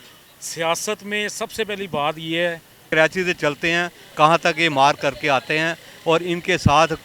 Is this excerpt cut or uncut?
cut